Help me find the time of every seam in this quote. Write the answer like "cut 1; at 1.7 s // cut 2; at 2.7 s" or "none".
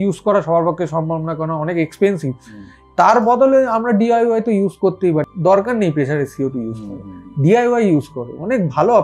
cut 1; at 5.3 s